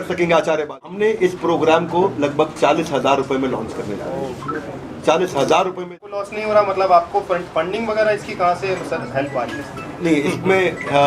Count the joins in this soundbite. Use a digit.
2